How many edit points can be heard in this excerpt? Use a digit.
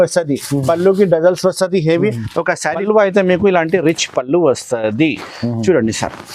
1